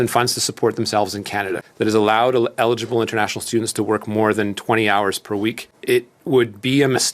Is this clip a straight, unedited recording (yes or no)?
no